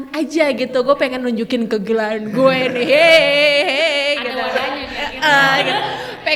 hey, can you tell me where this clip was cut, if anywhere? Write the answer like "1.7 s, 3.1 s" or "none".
none